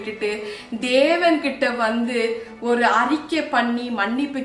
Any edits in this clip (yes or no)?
no